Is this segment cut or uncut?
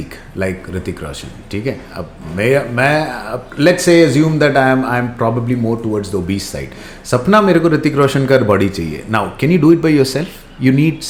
uncut